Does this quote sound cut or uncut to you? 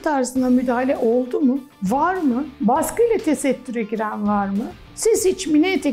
cut